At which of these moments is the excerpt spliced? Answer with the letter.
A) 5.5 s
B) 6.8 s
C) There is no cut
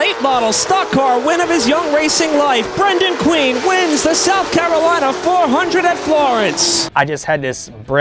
C